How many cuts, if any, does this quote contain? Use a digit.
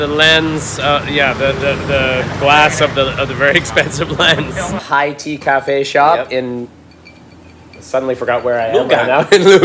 1